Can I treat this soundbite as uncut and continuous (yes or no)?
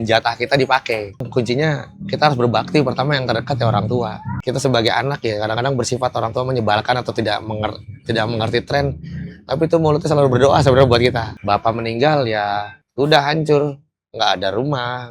no